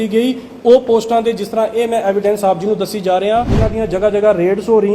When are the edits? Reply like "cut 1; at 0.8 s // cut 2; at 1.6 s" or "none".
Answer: cut 1; at 3.6 s